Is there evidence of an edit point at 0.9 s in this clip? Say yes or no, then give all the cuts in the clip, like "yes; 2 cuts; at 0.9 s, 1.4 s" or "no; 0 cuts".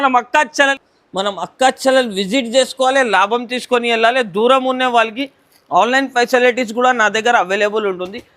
yes; 1 cut; at 0.9 s